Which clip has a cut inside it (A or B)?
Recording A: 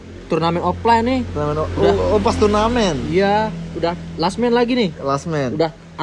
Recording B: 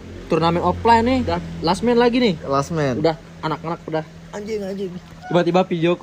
B